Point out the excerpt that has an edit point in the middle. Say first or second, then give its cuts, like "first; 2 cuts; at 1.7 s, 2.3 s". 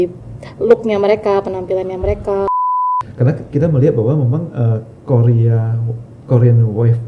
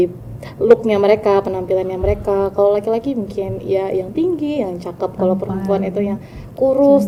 first; 1 cut; at 2.5 s